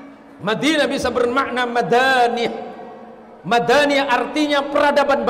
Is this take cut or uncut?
uncut